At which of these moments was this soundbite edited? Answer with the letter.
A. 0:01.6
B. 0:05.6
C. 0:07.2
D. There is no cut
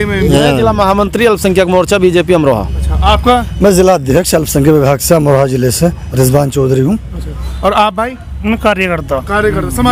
D